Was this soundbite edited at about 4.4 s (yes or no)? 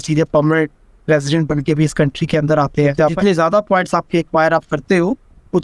no